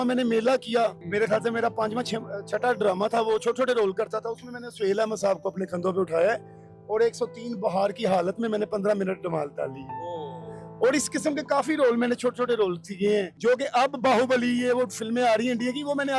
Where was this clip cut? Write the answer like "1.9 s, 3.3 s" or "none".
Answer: 1.0 s, 13.3 s

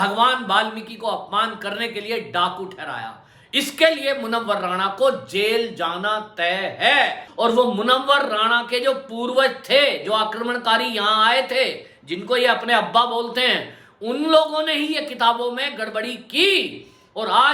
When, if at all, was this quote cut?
7.3 s

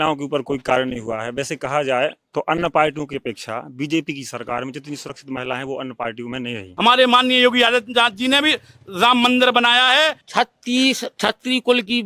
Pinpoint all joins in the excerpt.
6.7 s, 10.2 s

